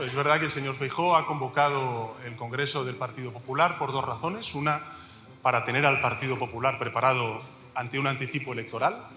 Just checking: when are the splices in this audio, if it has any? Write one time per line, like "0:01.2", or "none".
none